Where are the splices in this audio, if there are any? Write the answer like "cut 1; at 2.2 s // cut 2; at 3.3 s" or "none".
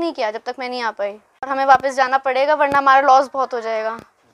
cut 1; at 1.5 s